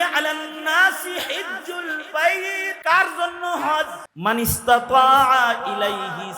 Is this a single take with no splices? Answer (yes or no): no